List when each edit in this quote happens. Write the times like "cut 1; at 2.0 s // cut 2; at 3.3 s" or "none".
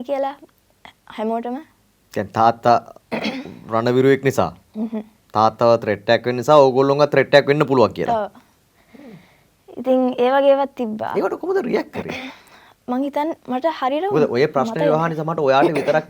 none

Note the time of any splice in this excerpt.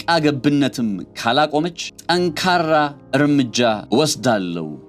cut 1; at 1.9 s // cut 2; at 3.0 s // cut 3; at 3.8 s

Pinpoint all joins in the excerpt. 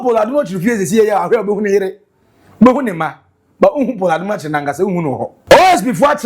cut 1; at 5.4 s

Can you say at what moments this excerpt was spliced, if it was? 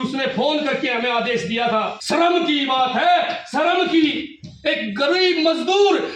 cut 1; at 2.0 s

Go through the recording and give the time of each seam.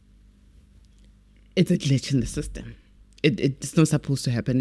none

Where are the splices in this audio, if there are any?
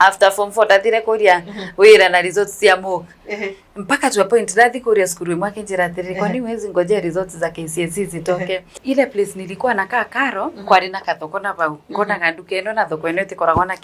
cut 1; at 8.7 s

